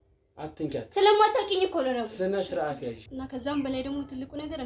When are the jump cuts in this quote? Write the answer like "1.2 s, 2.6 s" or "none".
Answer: 3.0 s